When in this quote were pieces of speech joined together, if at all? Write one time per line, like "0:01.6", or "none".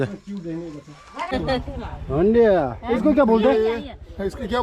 0:01.3

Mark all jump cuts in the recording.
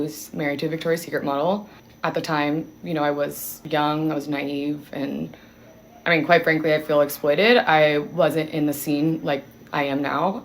0:03.5

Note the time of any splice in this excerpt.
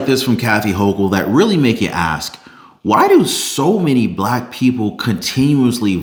none

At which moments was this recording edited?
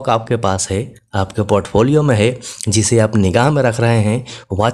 none

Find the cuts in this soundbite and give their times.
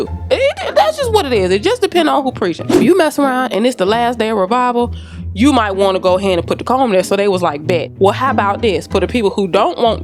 none

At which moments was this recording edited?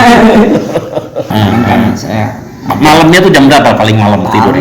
0:01.3

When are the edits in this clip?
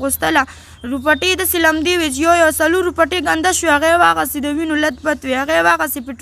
none

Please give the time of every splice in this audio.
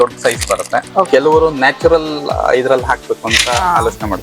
0:01.1

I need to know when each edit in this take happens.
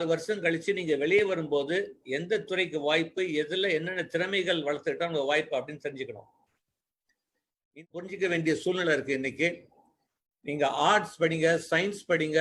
0:07.8

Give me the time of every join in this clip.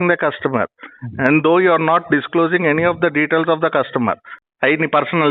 0:04.3

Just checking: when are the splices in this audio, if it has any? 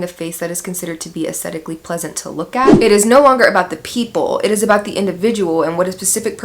0:02.7

